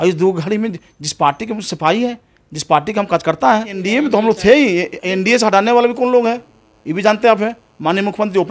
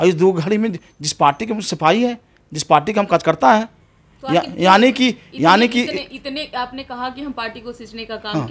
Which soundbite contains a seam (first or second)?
first